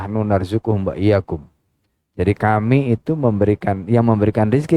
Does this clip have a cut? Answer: no; 0 cuts

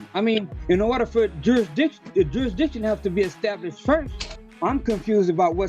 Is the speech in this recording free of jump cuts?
no; 1 cut; at 4.5 s

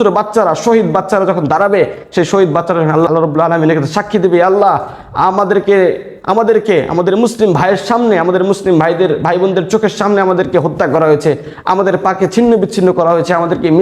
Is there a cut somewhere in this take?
yes; 1 cut; at 3.1 s

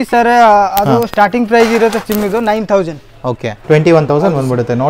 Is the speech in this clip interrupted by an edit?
yes; 1 cut; at 3.5 s

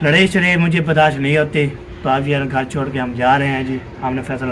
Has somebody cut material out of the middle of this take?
no; 0 cuts

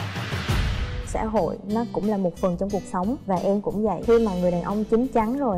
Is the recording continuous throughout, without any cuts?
no; 1 cut; at 1.0 s

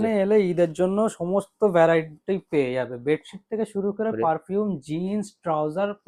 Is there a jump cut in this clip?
no; 0 cuts

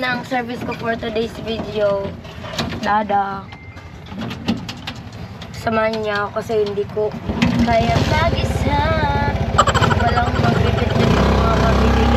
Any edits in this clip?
no; 0 cuts

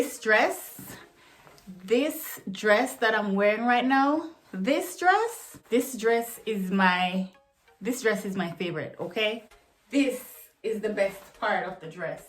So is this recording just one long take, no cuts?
no; 2 cuts; at 5.6 s, 9.4 s

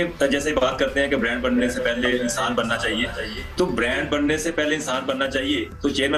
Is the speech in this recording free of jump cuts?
yes; 0 cuts

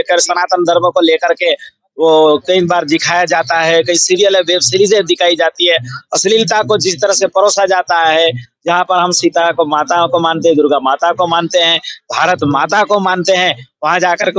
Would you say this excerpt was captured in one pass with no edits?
yes; 0 cuts

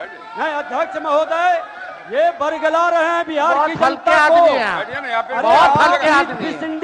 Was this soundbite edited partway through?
no; 0 cuts

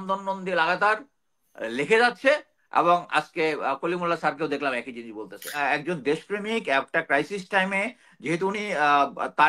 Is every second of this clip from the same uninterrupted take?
yes; 0 cuts

